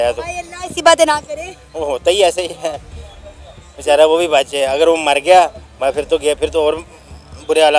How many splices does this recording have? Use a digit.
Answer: 0